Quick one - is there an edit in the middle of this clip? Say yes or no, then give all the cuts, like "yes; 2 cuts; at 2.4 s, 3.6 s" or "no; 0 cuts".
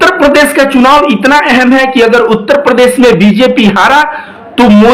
no; 0 cuts